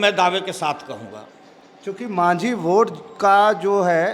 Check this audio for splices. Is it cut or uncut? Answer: uncut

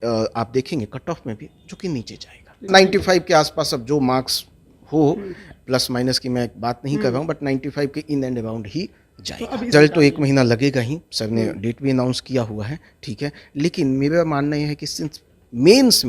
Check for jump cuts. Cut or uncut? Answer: cut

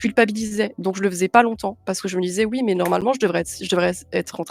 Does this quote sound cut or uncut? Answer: uncut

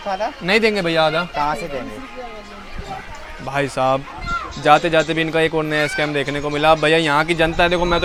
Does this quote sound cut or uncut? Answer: uncut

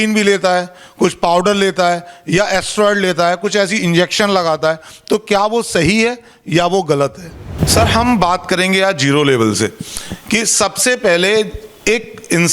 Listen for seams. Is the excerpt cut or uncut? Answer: cut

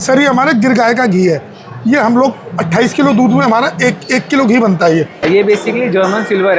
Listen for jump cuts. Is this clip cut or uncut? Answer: cut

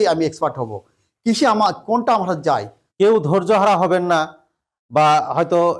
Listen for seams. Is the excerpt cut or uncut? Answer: cut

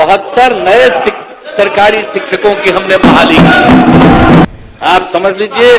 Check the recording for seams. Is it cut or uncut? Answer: cut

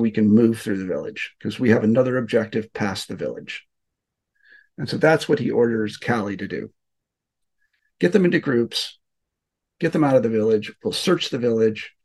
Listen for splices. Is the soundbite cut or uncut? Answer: uncut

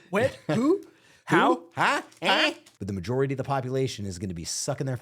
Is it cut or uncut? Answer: cut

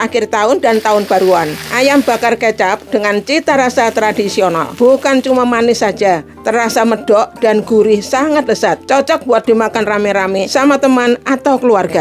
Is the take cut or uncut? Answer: cut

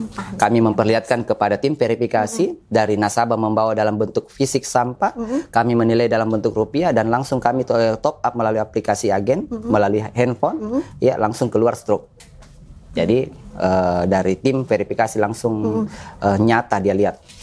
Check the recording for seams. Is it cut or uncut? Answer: uncut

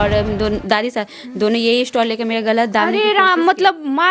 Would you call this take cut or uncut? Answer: uncut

